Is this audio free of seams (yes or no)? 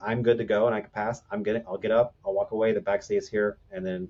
yes